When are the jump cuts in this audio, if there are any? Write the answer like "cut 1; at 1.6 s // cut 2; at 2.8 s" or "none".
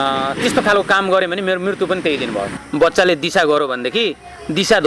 cut 1; at 2.5 s